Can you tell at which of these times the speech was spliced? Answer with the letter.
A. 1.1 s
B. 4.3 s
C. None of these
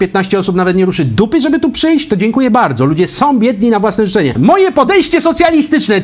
B